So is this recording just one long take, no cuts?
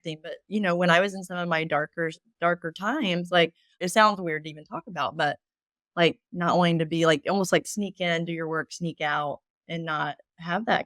no; 1 cut; at 3.8 s

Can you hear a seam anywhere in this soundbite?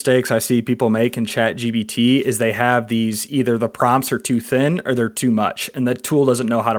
no; 0 cuts

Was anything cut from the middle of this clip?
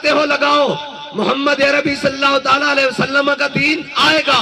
no; 0 cuts

